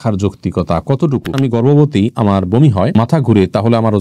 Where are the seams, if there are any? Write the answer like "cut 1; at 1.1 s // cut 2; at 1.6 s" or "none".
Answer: cut 1; at 1.3 s